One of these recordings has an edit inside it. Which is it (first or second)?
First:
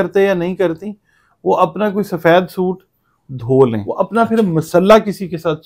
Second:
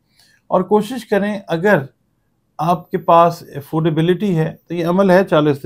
first